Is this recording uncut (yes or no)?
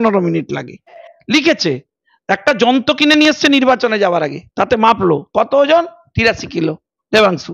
no